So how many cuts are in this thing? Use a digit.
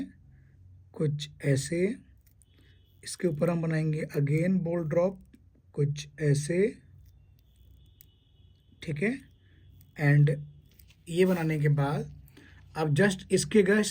0